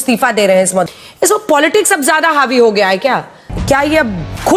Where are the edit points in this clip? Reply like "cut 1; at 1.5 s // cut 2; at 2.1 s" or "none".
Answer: cut 1; at 0.9 s // cut 2; at 3.5 s